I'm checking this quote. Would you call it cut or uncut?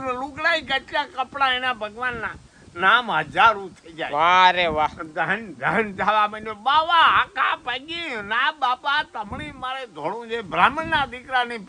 uncut